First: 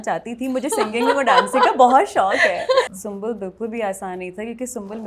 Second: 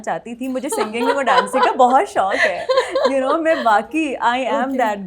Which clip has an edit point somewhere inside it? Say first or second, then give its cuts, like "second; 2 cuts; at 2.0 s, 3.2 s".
first; 1 cut; at 2.9 s